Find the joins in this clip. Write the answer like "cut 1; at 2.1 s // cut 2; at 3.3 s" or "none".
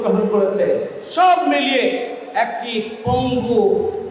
none